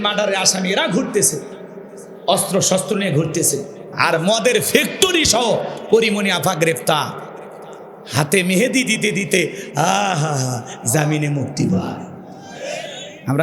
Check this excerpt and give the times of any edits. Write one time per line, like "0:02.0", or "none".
0:03.9